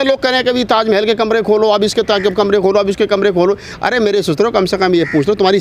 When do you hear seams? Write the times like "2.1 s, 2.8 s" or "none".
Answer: none